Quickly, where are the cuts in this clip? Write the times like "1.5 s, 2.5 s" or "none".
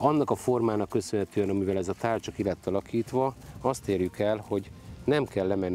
none